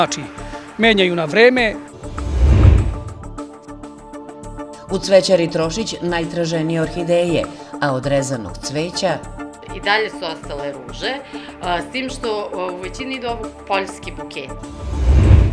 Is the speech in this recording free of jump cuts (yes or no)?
no